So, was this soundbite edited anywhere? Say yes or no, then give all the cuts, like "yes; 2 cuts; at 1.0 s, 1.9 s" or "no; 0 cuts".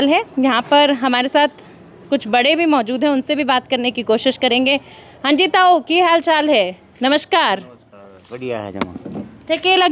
no; 0 cuts